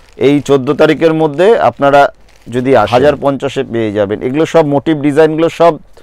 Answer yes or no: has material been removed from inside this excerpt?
yes